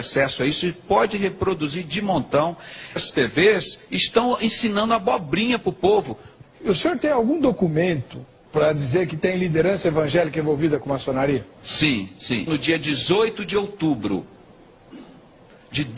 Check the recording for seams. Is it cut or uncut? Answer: uncut